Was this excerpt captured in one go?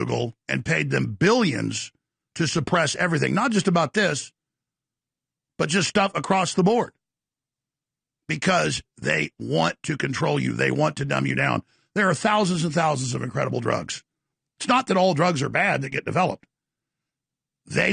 yes; 0 cuts

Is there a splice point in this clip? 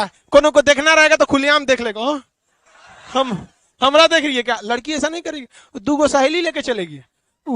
no; 0 cuts

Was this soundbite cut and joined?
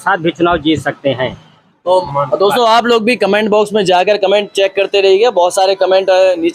yes; 1 cut; at 2.0 s

